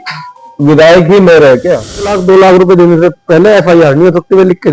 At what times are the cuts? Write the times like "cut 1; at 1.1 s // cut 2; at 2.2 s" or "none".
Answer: cut 1; at 2.2 s